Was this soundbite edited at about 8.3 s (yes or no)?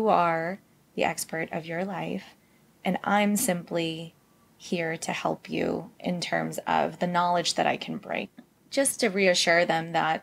yes